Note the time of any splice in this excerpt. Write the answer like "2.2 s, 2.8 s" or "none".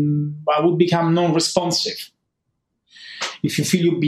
2.3 s